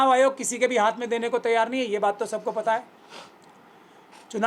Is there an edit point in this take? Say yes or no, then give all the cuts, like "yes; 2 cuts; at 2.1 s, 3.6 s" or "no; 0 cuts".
no; 0 cuts